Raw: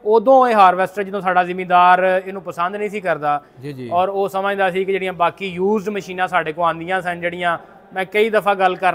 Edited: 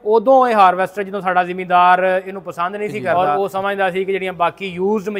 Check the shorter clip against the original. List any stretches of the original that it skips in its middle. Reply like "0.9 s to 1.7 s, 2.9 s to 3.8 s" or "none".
3.1 s to 3.9 s